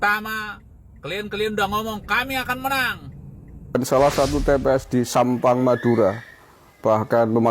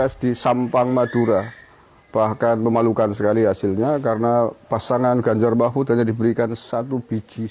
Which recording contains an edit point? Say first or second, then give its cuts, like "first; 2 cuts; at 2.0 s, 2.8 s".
first; 1 cut; at 3.8 s